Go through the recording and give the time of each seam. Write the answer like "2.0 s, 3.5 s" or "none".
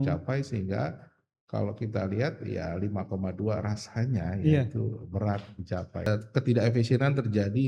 6.1 s